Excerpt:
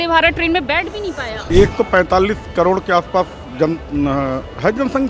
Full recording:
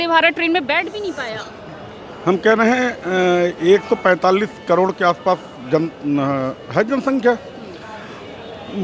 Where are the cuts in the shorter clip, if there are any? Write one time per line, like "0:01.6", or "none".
0:01.4